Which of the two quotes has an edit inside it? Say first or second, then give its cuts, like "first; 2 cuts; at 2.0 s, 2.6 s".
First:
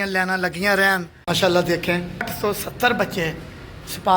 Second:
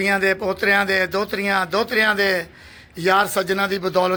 first; 2 cuts; at 1.1 s, 2.3 s